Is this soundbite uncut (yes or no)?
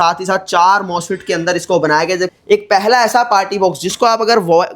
no